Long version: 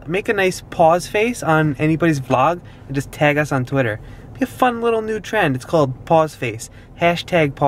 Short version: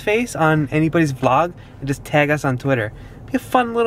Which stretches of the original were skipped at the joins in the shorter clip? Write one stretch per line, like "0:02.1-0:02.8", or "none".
none